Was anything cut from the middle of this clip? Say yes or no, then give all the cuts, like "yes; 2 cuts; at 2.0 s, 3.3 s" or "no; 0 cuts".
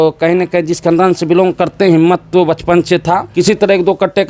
yes; 1 cut; at 3.3 s